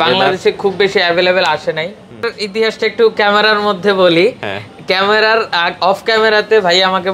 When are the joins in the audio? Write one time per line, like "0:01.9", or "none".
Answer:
0:02.4